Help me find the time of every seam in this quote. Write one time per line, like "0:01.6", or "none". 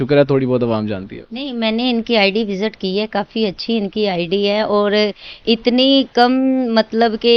none